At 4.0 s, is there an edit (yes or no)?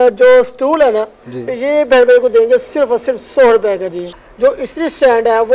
yes